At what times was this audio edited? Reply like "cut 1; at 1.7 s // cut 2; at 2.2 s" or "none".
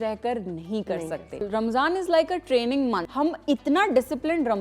cut 1; at 1.5 s // cut 2; at 3.1 s